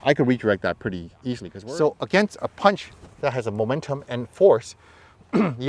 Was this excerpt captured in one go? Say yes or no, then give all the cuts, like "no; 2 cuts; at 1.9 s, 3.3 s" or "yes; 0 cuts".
no; 1 cut; at 1.5 s